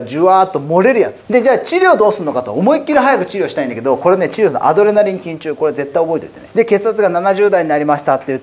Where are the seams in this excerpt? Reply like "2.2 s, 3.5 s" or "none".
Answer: 1.2 s, 6.4 s